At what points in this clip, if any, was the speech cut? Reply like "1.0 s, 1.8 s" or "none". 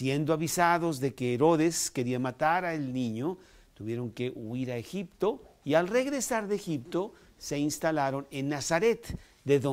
4.2 s